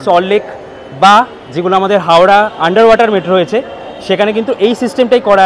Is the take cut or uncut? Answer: uncut